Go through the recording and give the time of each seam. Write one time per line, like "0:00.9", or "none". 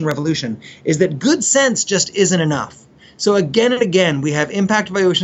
none

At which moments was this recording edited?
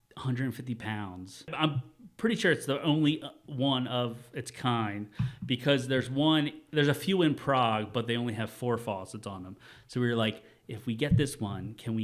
0:01.5

